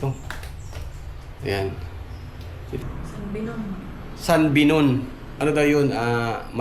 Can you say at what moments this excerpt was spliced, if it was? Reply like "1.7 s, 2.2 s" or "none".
2.7 s